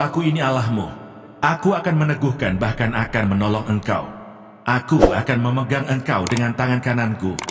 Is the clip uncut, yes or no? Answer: yes